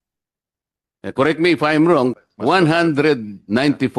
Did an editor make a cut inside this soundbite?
yes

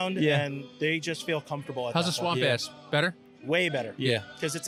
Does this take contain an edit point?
no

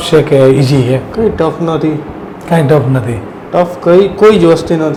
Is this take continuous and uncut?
yes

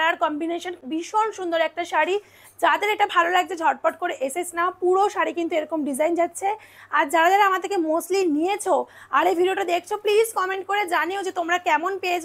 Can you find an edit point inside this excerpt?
no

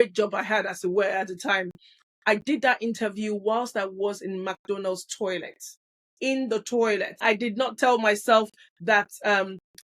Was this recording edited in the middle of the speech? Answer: yes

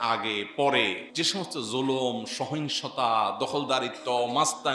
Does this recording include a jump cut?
yes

